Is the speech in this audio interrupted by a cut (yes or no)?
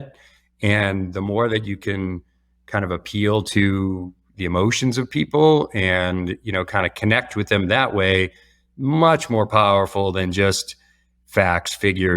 no